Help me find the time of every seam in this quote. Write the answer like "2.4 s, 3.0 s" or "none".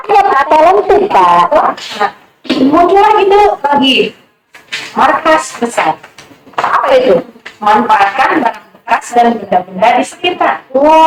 1.5 s